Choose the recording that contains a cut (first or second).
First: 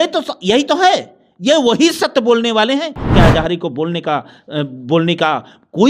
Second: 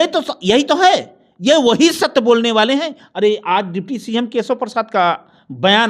first